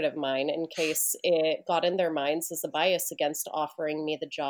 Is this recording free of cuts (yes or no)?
yes